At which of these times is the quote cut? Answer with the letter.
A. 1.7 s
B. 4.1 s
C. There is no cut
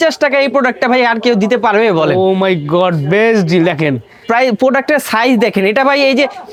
C